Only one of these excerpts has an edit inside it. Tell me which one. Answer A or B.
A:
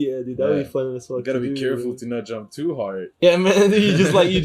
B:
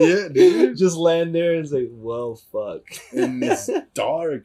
A